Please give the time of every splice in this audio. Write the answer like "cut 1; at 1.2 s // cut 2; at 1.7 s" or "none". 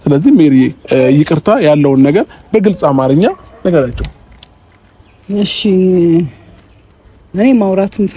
none